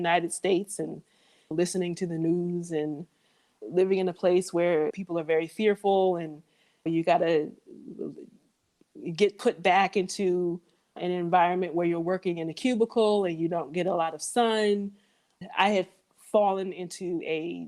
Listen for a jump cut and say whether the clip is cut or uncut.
uncut